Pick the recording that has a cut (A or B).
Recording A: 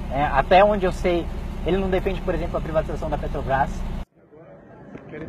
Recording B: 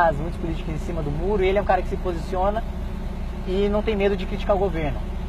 A